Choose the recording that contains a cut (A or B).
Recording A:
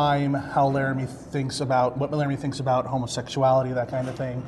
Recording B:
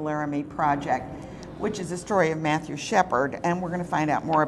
A